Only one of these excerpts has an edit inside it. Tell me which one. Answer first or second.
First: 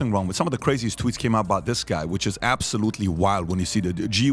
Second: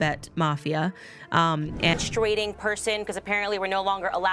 second